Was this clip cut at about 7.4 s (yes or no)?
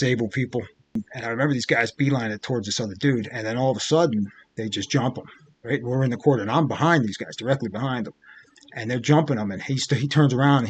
no